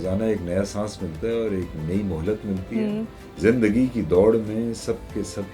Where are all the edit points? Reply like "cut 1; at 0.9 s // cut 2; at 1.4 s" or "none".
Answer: cut 1; at 3.2 s

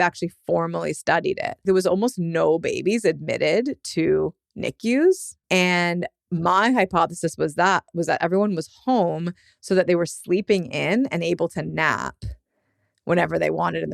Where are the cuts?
cut 1; at 1.6 s // cut 2; at 5.3 s

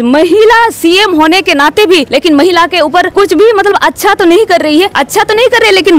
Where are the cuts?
cut 1; at 2.1 s // cut 2; at 3.1 s // cut 3; at 5.0 s

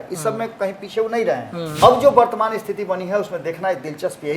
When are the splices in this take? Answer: cut 1; at 1.6 s

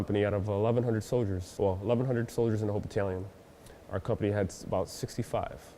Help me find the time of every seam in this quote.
cut 1; at 1.4 s

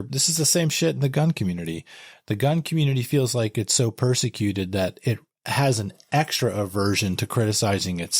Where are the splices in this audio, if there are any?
none

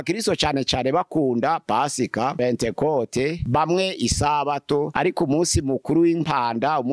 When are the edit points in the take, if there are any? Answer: cut 1; at 2.4 s // cut 2; at 3.4 s // cut 3; at 4.9 s

